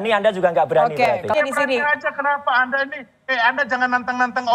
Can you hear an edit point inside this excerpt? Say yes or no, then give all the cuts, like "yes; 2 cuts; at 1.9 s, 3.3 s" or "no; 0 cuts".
yes; 1 cut; at 1.3 s